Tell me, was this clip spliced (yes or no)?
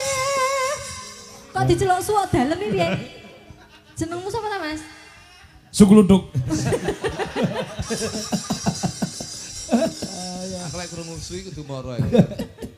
no